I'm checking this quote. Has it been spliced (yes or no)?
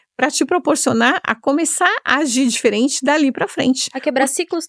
no